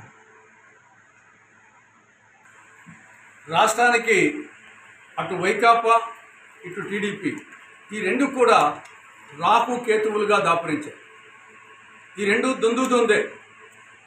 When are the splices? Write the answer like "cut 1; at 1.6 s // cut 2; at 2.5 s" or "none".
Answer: cut 1; at 1.9 s